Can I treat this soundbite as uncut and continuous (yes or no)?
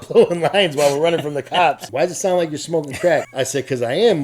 no